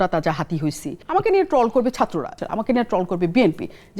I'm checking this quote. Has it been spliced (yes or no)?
yes